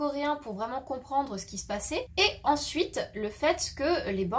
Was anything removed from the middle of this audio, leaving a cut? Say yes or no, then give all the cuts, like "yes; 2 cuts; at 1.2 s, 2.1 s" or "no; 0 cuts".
yes; 1 cut; at 2.1 s